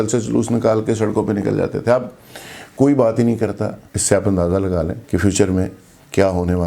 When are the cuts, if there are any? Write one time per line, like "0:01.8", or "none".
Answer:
0:03.9
0:05.0